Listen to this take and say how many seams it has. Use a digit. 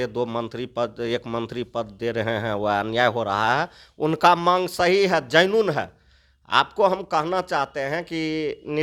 0